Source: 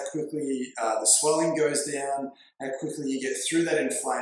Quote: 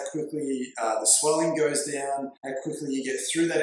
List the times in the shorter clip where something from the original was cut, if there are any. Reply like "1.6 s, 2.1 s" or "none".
2.4 s